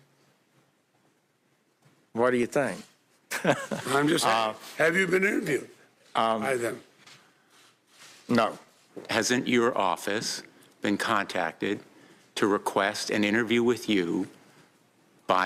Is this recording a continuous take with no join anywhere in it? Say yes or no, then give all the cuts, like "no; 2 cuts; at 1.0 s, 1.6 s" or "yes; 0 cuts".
yes; 0 cuts